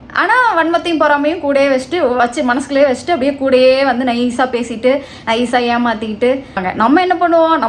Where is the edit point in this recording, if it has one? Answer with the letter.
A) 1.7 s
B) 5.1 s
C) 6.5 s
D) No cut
C